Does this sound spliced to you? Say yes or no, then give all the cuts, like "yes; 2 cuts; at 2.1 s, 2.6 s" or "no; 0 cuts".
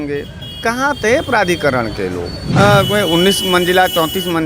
yes; 1 cut; at 2.4 s